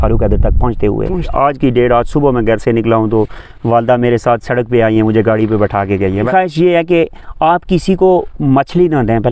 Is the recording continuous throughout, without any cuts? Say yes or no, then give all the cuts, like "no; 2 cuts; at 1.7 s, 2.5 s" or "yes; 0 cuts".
no; 2 cuts; at 1.3 s, 6.3 s